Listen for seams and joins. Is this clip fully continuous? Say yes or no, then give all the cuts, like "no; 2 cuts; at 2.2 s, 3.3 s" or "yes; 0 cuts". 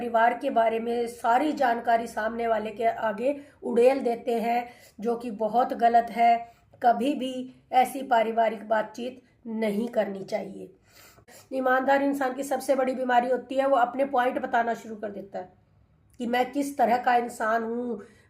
no; 1 cut; at 11.4 s